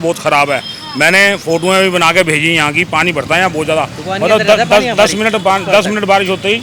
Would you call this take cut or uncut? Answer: uncut